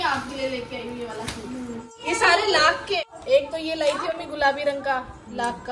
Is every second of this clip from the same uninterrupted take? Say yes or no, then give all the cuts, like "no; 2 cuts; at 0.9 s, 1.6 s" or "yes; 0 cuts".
no; 2 cuts; at 1.9 s, 3.1 s